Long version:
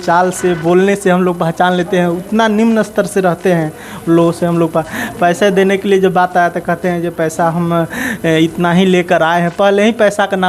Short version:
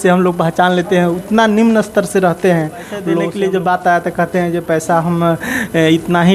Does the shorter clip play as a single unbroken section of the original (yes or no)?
no